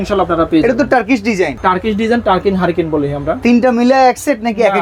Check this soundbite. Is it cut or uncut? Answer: cut